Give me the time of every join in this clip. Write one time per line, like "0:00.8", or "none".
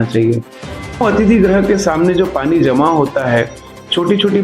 0:01.0